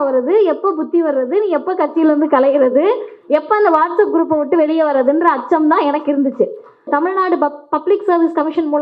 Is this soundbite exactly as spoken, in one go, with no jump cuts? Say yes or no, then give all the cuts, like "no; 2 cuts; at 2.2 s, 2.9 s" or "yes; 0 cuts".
no; 1 cut; at 6.9 s